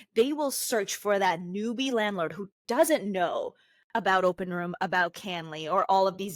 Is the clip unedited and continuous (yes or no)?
yes